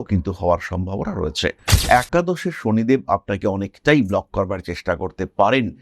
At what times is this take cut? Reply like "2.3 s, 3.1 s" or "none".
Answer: 1.7 s